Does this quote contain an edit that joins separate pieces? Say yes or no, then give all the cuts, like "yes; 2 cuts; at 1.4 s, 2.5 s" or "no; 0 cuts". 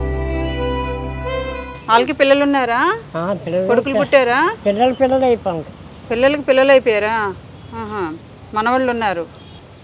no; 0 cuts